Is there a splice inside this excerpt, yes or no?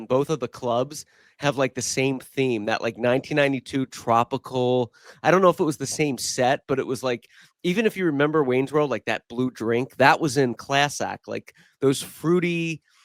no